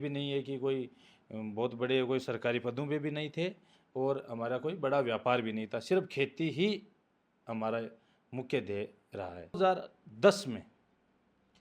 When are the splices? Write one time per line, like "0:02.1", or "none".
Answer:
0:09.6